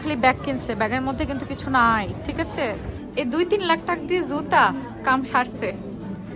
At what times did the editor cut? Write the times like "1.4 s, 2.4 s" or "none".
3.0 s